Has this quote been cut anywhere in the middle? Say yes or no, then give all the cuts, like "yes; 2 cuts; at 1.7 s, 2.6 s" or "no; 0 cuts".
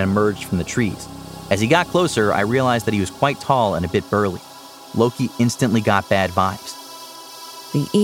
yes; 1 cut; at 7.1 s